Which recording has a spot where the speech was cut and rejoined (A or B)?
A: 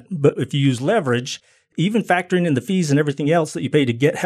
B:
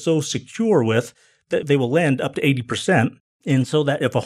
B